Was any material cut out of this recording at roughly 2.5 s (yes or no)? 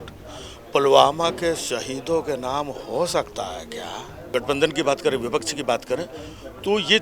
no